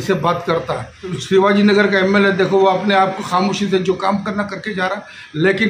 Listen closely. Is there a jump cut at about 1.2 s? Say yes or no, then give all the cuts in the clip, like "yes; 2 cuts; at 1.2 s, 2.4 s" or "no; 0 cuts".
yes; 1 cut; at 1.2 s